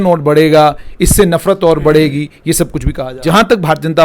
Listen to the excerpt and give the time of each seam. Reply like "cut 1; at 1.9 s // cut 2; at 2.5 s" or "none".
cut 1; at 3.1 s